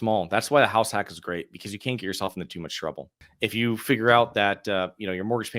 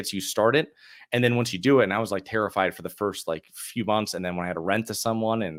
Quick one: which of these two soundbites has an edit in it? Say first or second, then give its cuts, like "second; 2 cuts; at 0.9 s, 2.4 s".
first; 1 cut; at 3.1 s